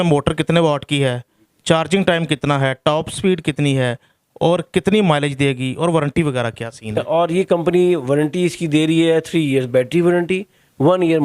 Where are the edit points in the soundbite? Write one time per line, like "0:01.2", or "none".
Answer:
0:07.0